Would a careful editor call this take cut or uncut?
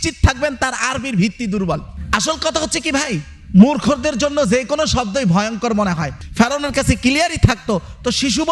cut